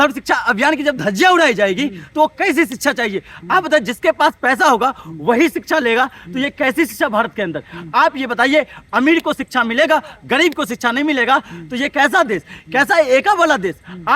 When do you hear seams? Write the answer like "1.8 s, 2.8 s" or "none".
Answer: none